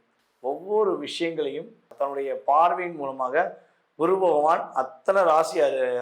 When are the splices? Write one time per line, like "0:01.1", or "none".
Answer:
0:01.9